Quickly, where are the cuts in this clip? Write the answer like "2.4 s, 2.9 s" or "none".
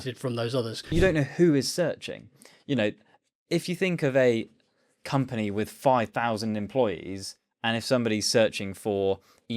0.9 s